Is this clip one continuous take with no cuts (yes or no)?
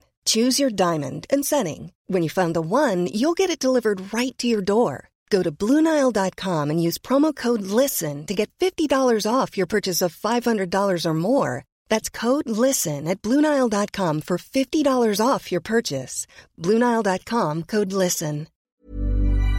no